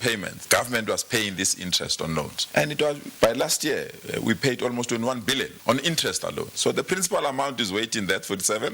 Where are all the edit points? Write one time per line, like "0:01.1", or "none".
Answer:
none